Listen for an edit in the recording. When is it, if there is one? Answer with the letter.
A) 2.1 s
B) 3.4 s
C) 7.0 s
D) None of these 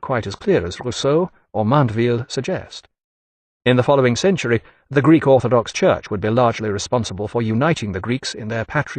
C